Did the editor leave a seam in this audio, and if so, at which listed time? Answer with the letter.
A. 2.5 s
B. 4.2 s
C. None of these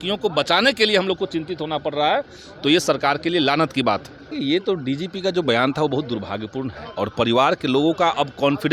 B